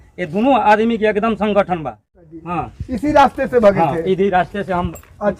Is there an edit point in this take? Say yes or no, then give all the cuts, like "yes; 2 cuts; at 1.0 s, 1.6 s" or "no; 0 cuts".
yes; 1 cut; at 2.1 s